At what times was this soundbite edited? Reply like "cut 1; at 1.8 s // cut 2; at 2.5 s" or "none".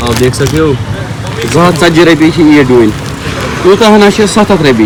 none